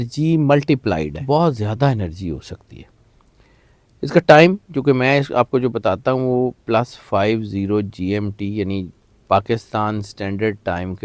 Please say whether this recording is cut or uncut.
cut